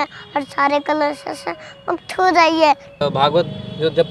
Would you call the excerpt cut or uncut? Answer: cut